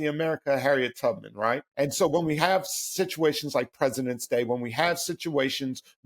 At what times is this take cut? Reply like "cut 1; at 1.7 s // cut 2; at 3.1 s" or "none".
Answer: cut 1; at 1.7 s